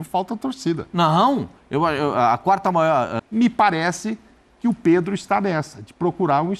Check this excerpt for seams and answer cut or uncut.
cut